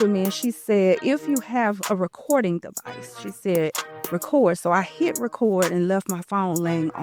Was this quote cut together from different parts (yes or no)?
no